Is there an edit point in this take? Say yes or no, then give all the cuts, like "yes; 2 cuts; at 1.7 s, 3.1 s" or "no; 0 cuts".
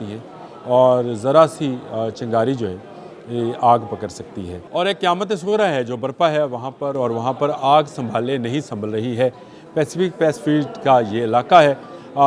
yes; 1 cut; at 4.6 s